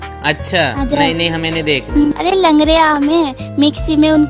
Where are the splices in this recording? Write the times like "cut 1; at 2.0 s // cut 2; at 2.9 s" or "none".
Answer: cut 1; at 2.2 s